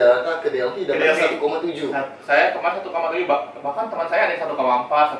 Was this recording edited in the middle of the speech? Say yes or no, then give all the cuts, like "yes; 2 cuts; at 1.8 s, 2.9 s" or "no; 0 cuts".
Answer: no; 0 cuts